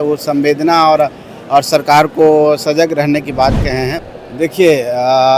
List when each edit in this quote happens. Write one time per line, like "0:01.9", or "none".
0:04.0